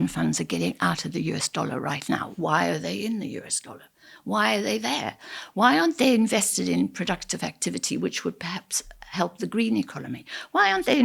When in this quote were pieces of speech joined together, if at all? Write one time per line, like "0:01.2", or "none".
none